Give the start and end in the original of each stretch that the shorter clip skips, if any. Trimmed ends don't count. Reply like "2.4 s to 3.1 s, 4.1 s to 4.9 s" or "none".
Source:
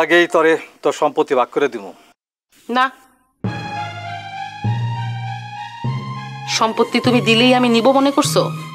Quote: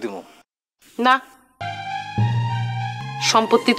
3.3 s to 4.0 s, 5.5 s to 6.3 s